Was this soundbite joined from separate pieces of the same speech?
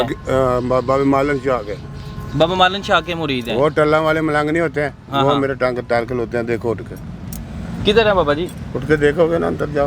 no; 0 cuts

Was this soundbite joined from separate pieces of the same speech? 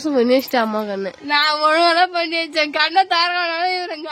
no; 0 cuts

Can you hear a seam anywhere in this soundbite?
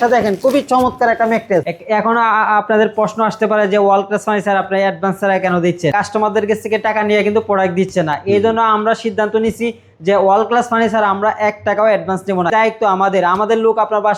yes; 3 cuts; at 1.7 s, 5.9 s, 12.5 s

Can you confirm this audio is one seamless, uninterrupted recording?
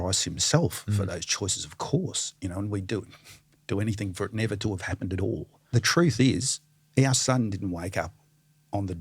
no; 1 cut; at 5.5 s

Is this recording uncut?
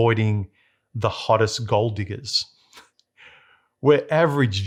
yes; 0 cuts

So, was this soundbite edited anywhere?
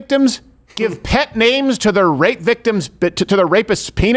no; 0 cuts

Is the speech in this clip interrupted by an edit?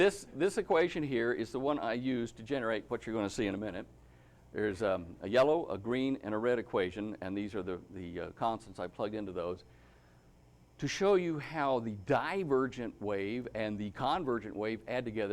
yes; 2 cuts; at 3.8 s, 10.2 s

